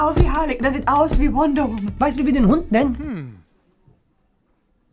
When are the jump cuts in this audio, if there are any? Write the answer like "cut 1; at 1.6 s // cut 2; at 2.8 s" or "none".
cut 1; at 1.9 s